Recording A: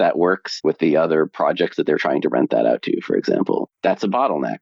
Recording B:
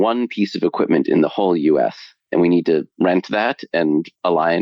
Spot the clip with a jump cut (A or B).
A